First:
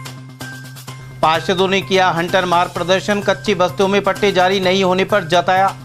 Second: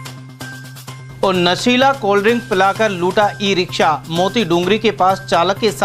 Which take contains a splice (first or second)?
first